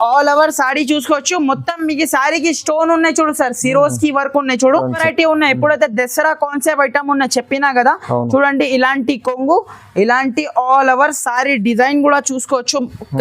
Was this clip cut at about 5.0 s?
yes; 1 cut; at 5.0 s

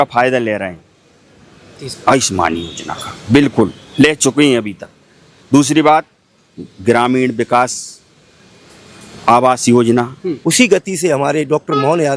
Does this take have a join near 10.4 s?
yes; 1 cut; at 10.4 s

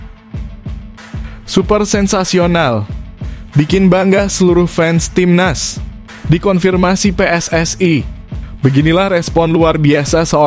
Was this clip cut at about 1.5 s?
yes; 1 cut; at 1.5 s

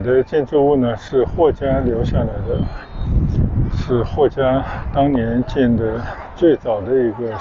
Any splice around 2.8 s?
no; 0 cuts

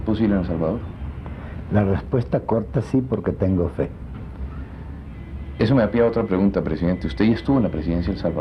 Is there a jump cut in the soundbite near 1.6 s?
no; 0 cuts

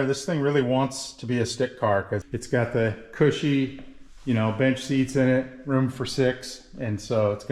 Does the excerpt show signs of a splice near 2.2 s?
yes; 1 cut; at 2.2 s

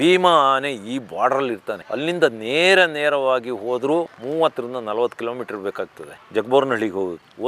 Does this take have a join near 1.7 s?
yes; 1 cut; at 1.7 s

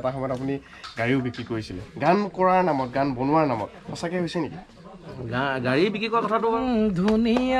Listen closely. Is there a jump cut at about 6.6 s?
yes; 1 cut; at 6.6 s

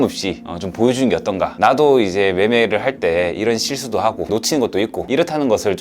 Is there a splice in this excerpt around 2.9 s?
no; 2 cuts; at 1.5 s, 4.3 s

